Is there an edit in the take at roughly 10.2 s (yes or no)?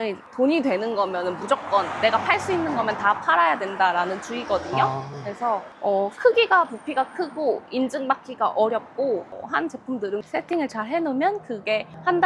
yes